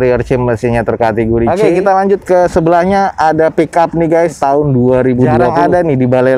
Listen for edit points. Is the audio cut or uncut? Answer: cut